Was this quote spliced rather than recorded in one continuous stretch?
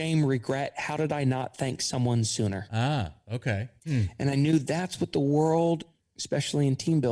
yes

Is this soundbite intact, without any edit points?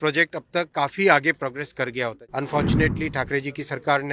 no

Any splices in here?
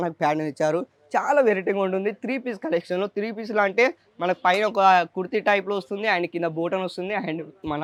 no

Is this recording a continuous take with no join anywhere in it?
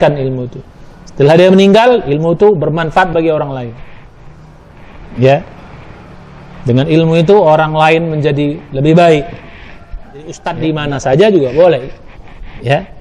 no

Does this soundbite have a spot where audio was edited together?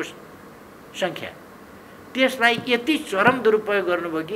no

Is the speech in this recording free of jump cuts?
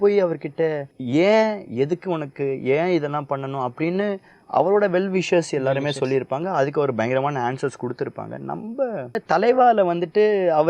no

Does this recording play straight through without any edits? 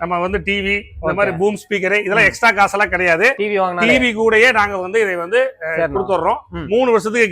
yes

